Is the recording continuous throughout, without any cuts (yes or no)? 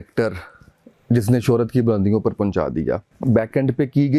no